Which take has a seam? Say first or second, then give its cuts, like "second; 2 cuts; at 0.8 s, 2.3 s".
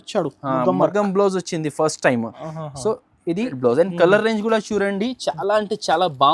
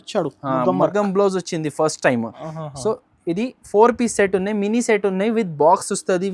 first; 1 cut; at 3.6 s